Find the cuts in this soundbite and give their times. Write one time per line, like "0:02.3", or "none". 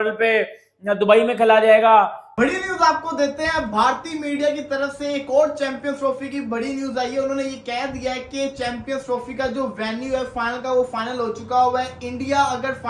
0:02.4